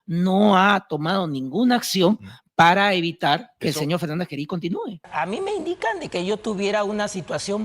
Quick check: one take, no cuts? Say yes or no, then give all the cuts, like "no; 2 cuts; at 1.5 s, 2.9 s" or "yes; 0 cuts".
no; 1 cut; at 5.0 s